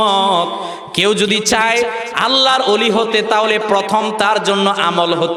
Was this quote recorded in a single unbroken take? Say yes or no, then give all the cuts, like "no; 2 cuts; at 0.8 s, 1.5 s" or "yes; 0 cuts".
yes; 0 cuts